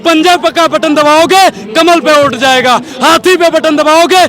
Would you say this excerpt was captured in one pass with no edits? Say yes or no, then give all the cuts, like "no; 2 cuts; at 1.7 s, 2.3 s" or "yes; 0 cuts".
yes; 0 cuts